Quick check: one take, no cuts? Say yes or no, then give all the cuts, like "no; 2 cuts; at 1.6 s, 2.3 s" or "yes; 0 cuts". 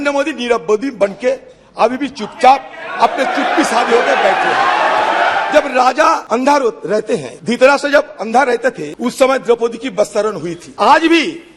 no; 5 cuts; at 5.4 s, 6.2 s, 7.3 s, 8.9 s, 10.6 s